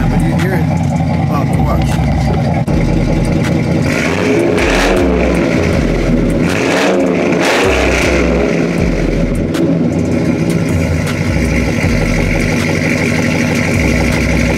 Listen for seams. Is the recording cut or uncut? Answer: uncut